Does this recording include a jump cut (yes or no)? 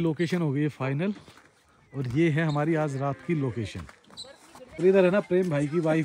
yes